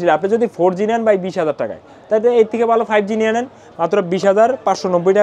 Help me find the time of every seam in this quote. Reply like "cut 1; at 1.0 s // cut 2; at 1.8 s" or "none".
none